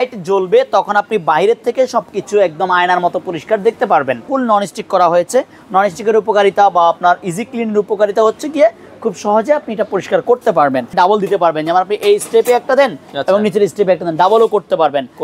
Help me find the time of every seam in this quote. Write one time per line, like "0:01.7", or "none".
0:04.3
0:10.9